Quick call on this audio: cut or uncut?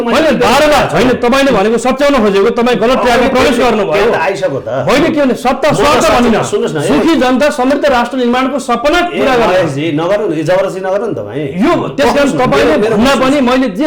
uncut